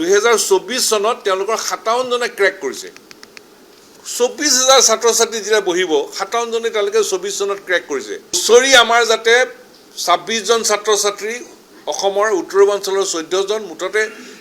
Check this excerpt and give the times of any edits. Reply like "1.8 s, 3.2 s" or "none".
8.4 s